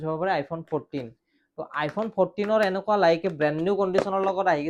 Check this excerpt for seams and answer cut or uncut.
uncut